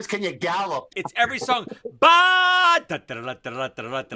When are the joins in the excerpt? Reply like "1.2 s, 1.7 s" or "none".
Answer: 0.9 s